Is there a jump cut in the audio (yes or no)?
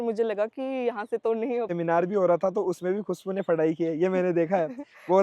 yes